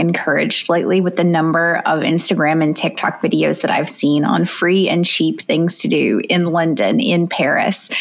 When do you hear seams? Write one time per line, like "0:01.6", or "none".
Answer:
none